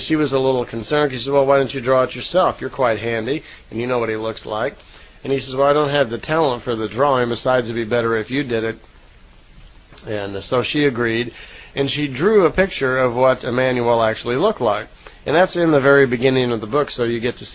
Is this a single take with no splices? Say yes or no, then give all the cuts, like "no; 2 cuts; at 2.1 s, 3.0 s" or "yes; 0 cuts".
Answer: no; 1 cut; at 4.9 s